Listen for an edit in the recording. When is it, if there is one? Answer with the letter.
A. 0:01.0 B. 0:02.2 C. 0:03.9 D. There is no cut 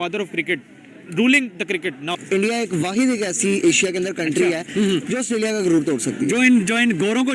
B